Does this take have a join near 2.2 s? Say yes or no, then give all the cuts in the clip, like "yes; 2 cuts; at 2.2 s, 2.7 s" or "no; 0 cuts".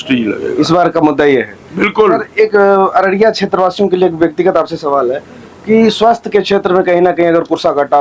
no; 0 cuts